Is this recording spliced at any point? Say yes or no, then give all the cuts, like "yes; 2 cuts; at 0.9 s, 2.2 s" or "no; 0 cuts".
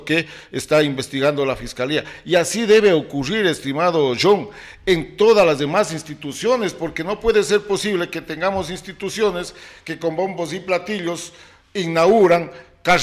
no; 0 cuts